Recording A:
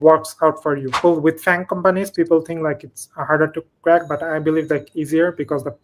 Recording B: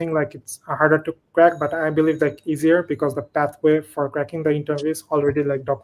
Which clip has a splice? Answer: A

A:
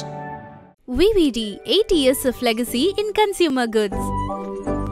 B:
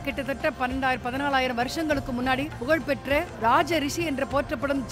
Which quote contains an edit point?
B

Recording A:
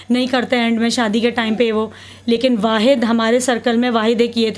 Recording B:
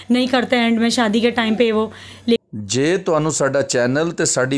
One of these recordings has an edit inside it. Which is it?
B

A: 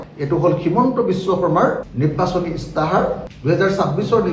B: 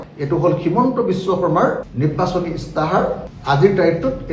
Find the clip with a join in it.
A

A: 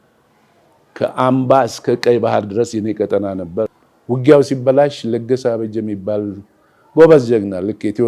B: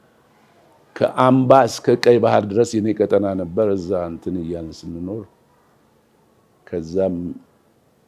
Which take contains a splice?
A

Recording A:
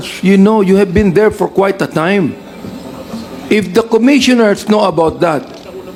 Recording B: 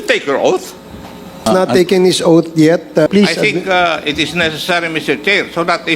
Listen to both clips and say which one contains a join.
B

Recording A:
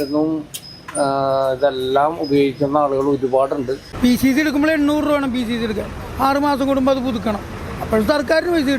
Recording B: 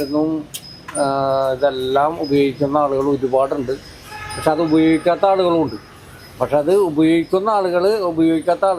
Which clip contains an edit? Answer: A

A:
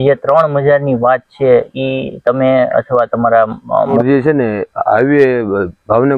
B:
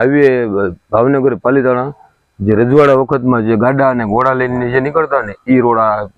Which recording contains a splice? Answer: A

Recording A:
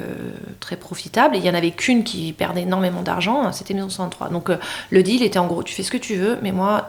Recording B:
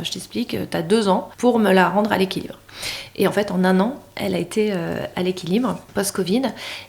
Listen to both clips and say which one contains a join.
B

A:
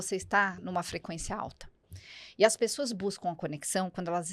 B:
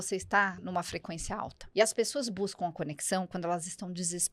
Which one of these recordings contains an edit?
B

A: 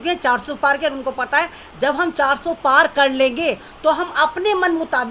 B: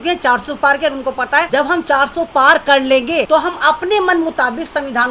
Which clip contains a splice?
B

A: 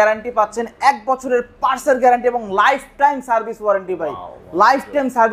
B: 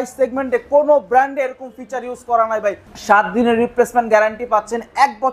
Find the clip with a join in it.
B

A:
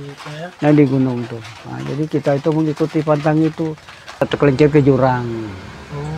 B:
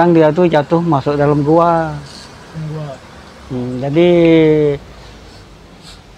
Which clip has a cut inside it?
A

